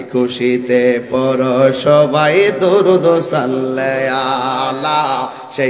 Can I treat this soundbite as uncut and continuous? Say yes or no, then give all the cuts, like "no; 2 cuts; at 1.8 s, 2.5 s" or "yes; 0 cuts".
yes; 0 cuts